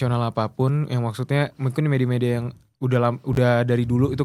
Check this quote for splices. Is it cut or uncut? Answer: uncut